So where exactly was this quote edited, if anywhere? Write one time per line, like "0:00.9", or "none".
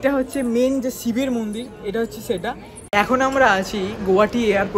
0:02.7